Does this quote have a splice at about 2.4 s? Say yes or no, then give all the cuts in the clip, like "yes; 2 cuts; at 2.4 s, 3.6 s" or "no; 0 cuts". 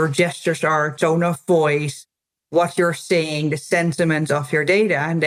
no; 0 cuts